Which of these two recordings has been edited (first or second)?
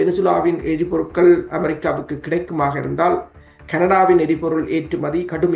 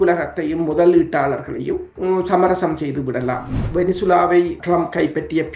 second